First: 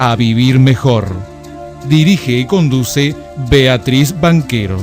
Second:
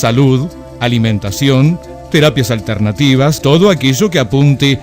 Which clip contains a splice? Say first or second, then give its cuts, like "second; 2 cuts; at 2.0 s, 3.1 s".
second; 1 cut; at 3.4 s